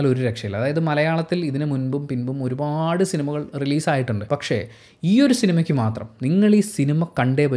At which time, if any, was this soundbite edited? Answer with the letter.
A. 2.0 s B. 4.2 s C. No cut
B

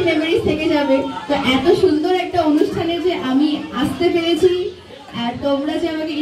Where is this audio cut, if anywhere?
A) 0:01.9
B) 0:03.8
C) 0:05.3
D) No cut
D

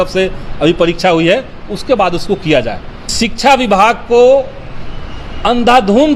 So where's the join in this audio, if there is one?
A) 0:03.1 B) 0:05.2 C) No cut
A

